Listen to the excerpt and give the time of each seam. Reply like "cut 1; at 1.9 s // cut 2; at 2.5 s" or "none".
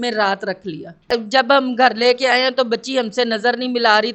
cut 1; at 1.1 s